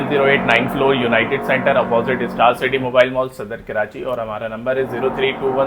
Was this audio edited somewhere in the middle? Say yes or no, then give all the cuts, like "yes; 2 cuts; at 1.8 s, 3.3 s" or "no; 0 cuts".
no; 0 cuts